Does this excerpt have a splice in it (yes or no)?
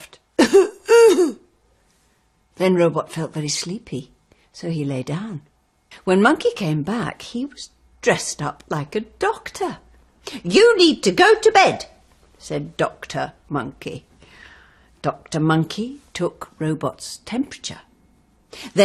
no